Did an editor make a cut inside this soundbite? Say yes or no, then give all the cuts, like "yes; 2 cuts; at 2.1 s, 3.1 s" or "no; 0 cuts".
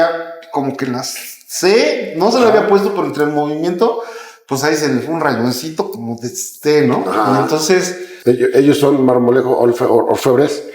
yes; 1 cut; at 8.0 s